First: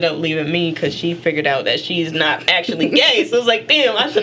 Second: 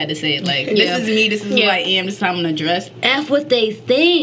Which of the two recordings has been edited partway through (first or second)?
second